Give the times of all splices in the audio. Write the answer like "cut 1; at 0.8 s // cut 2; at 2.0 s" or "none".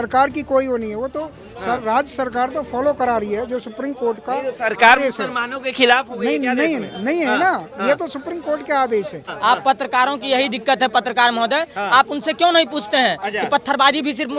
cut 1; at 9.2 s